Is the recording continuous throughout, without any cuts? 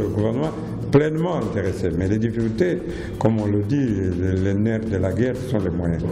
yes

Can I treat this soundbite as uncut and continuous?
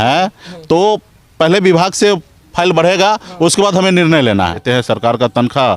no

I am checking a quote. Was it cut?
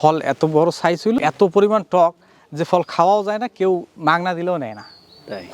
yes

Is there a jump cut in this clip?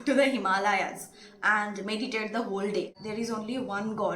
yes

